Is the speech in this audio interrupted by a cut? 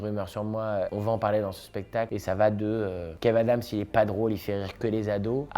yes; 2 cuts; at 0.9 s, 2.1 s

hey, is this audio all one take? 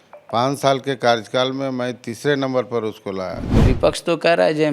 no; 1 cut; at 3.6 s

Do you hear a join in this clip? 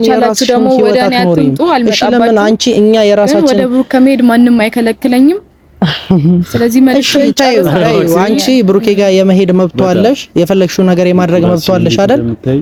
no; 0 cuts

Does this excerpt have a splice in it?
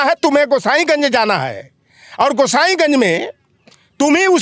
no; 0 cuts

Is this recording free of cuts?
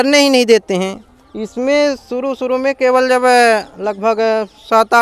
yes; 0 cuts

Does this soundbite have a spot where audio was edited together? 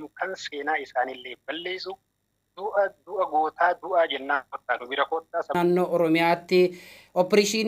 yes; 1 cut; at 5.6 s

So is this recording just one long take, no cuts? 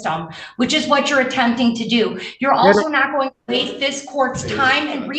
yes; 0 cuts

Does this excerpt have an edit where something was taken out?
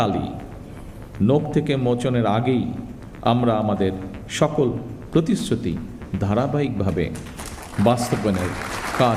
no; 0 cuts

